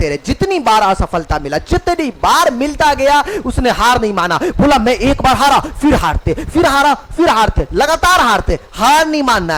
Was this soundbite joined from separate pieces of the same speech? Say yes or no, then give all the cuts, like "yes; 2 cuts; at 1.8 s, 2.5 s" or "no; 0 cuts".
no; 0 cuts